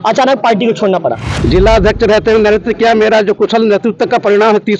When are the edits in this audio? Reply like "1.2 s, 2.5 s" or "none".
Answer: 1.3 s